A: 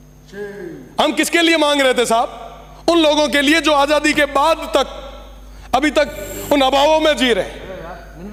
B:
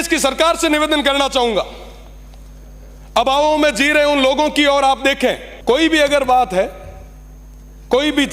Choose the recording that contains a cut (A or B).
B